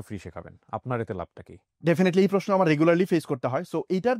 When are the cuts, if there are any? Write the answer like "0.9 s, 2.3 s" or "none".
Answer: none